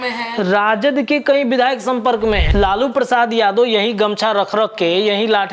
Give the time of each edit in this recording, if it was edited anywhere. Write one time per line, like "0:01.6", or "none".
0:02.5